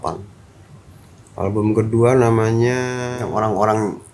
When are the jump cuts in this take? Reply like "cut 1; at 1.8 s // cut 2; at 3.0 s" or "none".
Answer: cut 1; at 3.1 s